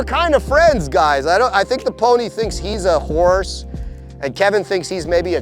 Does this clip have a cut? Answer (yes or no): yes